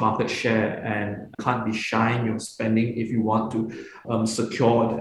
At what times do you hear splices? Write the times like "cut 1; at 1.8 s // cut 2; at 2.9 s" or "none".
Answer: cut 1; at 1.4 s // cut 2; at 4.0 s